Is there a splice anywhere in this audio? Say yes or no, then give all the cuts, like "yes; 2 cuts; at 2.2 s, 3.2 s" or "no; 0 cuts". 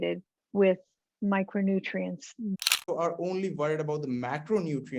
yes; 1 cut; at 2.6 s